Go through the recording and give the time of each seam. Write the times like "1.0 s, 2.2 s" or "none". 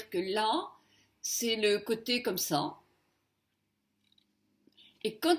none